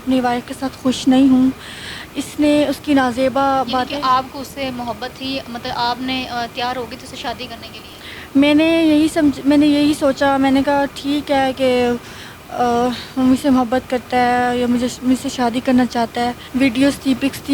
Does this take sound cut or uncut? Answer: uncut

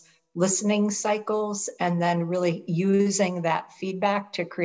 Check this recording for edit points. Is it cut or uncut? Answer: uncut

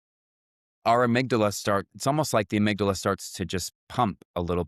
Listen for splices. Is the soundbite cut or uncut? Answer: uncut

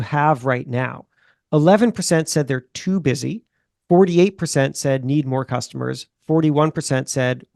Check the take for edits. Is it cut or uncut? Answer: uncut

